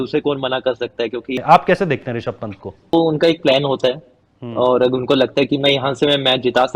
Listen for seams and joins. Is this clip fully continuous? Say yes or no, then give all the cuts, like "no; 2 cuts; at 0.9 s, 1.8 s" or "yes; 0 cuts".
no; 2 cuts; at 1.3 s, 2.9 s